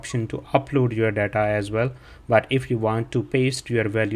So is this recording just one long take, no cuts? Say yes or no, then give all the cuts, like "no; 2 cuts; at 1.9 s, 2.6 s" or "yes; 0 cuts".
yes; 0 cuts